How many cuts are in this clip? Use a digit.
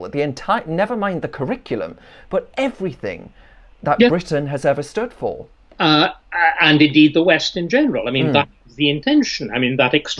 0